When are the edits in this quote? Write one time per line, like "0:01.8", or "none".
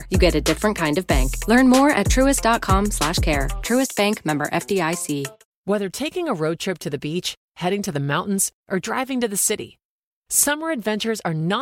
0:05.5